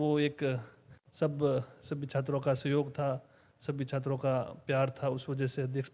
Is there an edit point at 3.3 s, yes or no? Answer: no